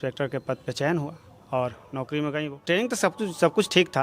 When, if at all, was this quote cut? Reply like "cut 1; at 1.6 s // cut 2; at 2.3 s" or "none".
cut 1; at 2.6 s

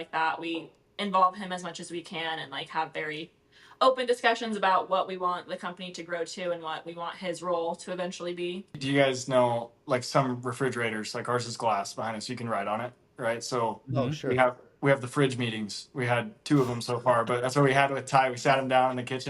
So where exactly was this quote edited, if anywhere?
cut 1; at 8.8 s

